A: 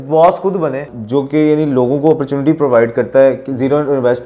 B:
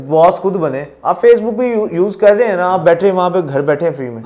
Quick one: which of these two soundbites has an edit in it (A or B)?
A